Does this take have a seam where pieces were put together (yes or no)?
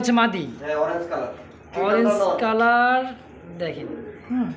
no